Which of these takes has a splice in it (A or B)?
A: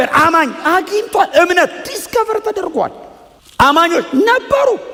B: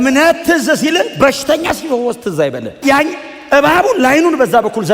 B